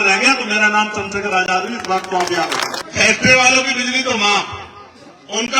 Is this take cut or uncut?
cut